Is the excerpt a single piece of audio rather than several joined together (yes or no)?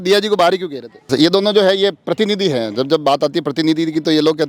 no